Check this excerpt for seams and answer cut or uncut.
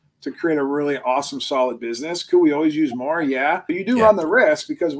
cut